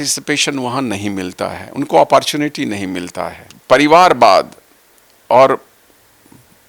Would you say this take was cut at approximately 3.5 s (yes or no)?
yes